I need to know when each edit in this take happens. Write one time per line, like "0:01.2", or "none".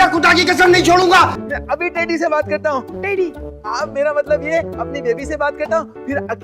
0:01.4